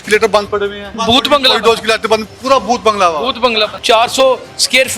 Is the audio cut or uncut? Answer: cut